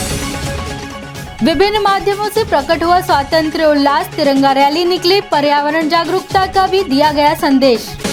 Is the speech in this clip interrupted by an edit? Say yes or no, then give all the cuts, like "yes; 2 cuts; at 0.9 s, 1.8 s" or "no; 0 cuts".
no; 0 cuts